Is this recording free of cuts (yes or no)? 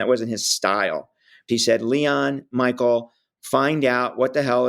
no